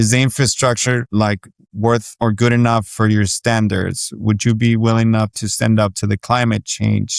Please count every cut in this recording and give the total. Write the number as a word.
two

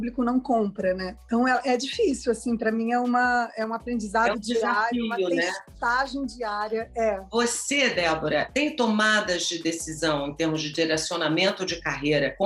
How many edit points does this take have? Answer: zero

